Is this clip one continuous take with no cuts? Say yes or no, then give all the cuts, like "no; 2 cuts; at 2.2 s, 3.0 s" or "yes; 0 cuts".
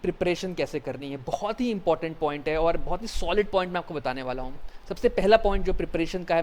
yes; 0 cuts